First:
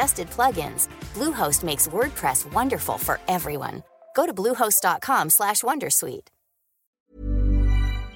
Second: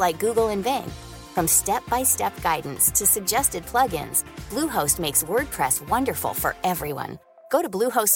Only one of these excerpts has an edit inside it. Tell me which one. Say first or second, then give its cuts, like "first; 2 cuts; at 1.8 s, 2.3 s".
first; 1 cut; at 7.1 s